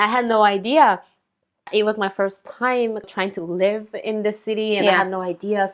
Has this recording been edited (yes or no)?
yes